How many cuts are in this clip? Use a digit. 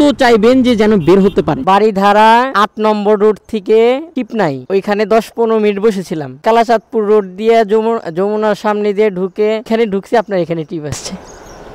1